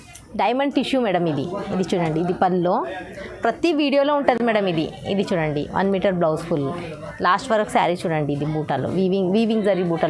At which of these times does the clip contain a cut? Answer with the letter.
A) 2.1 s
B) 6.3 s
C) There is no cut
C